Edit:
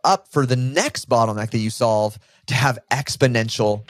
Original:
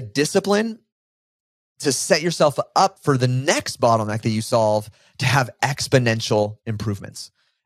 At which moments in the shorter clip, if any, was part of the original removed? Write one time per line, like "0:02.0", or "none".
none